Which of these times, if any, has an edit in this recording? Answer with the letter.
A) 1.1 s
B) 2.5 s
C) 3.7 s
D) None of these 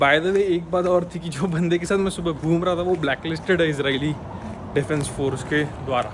D